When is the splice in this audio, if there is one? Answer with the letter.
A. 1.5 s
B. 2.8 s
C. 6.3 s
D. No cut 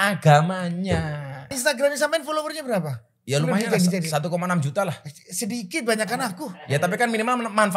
A